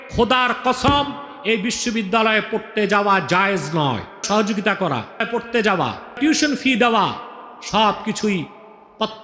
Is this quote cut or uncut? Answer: cut